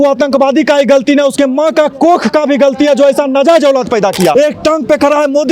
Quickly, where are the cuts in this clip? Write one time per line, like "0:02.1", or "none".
0:04.3